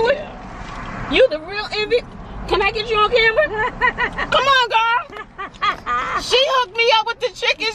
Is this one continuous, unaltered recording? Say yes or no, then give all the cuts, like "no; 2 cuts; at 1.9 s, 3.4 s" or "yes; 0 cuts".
yes; 0 cuts